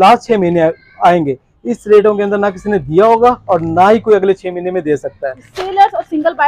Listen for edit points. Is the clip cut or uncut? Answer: cut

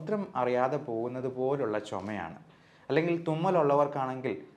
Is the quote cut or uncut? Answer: uncut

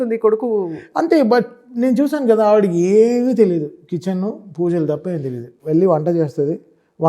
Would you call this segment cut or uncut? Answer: uncut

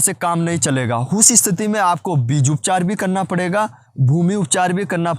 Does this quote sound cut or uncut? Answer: uncut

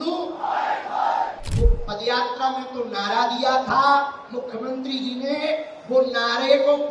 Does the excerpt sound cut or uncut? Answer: cut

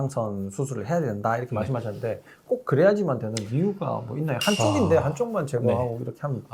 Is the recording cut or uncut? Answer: uncut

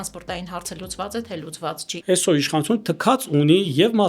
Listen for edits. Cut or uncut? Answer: cut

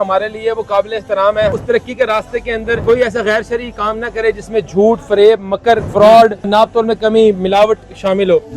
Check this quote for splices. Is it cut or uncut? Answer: cut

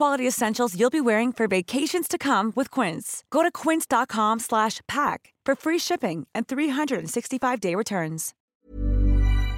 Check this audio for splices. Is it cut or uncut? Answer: cut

